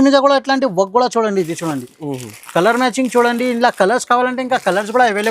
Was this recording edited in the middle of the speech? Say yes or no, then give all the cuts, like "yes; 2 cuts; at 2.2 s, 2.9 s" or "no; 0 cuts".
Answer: no; 0 cuts